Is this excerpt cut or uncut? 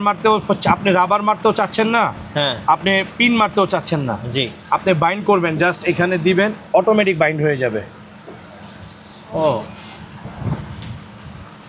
uncut